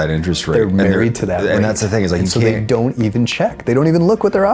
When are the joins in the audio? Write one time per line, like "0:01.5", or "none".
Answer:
none